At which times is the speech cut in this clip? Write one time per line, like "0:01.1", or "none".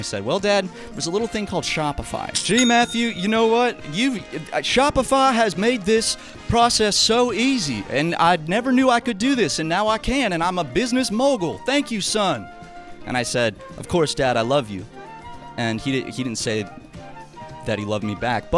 0:02.3